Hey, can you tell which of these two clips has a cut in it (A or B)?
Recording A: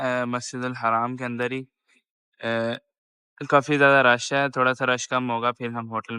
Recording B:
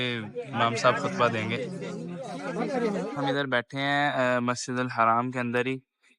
B